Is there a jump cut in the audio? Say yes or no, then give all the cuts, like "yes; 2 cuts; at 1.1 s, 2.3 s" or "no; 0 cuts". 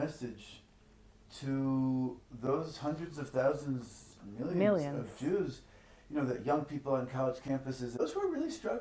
yes; 1 cut; at 7.9 s